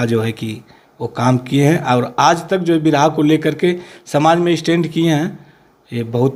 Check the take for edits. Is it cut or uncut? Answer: uncut